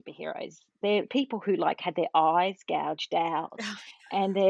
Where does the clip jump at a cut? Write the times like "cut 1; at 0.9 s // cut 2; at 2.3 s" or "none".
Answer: cut 1; at 1.1 s